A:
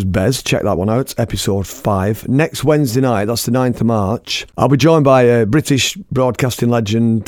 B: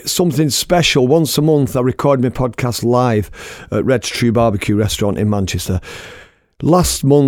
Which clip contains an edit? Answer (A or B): A